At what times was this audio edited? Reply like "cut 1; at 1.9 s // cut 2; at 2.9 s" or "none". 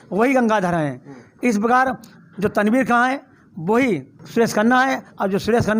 none